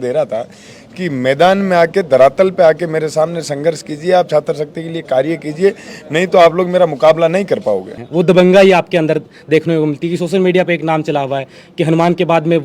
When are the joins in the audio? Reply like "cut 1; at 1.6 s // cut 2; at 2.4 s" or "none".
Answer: cut 1; at 8.0 s